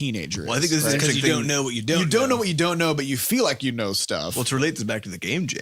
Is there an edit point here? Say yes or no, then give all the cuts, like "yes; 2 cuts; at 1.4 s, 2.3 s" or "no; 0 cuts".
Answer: no; 0 cuts